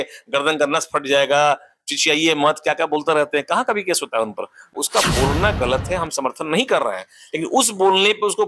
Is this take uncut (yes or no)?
no